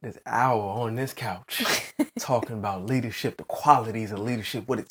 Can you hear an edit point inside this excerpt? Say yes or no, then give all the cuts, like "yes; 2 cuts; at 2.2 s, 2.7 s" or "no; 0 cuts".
no; 0 cuts